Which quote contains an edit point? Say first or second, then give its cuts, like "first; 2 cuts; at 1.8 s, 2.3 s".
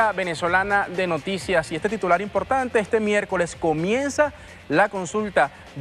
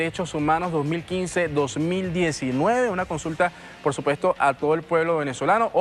second; 1 cut; at 0.9 s